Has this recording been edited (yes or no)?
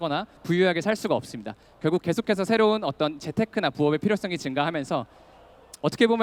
no